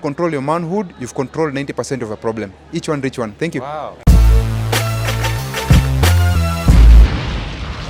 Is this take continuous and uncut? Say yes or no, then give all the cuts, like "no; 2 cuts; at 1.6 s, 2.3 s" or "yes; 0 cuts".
yes; 0 cuts